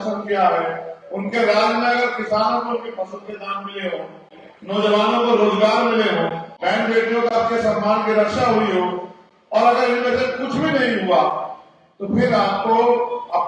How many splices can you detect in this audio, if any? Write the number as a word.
one